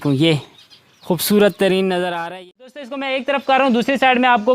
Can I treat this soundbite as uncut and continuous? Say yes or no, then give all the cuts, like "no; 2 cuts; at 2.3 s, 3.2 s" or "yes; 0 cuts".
no; 1 cut; at 3.0 s